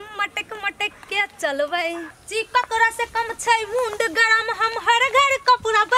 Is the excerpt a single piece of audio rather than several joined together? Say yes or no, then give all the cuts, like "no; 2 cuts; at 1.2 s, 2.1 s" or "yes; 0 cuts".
no; 1 cut; at 2.1 s